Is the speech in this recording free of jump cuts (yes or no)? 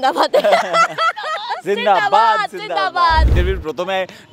no